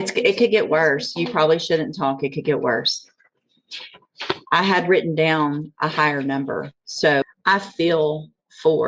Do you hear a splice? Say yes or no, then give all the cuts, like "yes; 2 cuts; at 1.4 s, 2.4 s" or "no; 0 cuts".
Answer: yes; 1 cut; at 7.2 s